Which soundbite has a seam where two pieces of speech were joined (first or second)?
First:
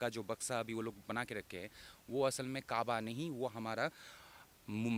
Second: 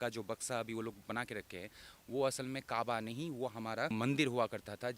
second